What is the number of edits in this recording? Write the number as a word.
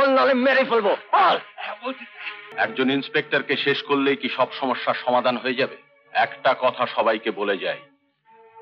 one